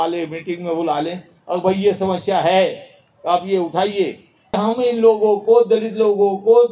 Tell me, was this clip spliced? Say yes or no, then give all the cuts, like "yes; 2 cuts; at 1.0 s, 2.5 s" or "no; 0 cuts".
yes; 1 cut; at 4.6 s